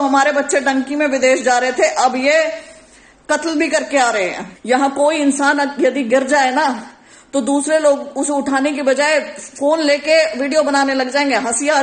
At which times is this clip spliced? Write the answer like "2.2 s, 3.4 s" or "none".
4.5 s